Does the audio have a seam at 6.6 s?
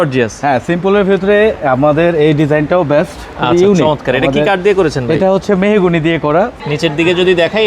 yes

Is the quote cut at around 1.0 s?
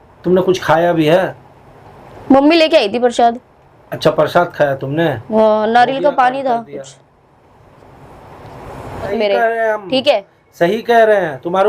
no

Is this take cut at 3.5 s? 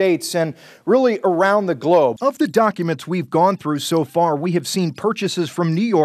no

